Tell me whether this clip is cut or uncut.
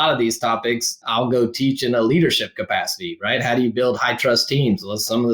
cut